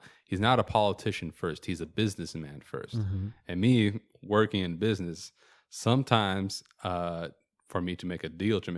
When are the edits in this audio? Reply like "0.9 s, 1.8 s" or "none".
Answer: none